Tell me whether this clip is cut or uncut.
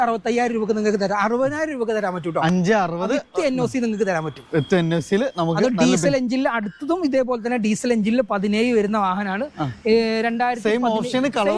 uncut